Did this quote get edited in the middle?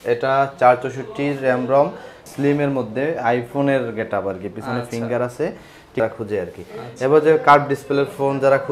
yes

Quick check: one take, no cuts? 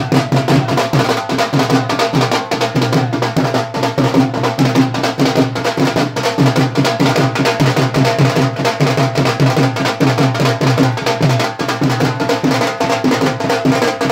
yes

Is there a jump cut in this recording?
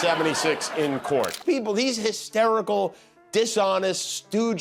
yes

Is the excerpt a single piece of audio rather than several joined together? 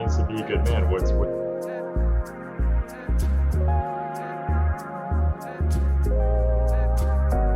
yes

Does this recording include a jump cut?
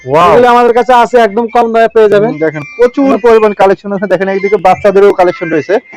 no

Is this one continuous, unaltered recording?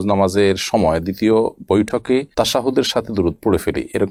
yes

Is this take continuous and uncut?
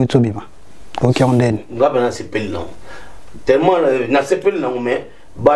yes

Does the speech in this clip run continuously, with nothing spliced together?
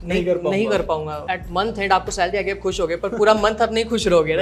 no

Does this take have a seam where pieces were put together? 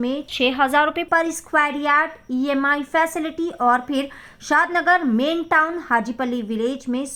no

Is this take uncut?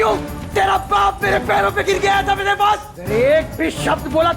no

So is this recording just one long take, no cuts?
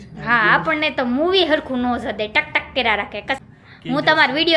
no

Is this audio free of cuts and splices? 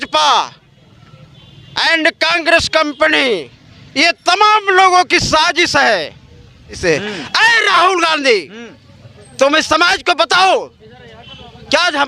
no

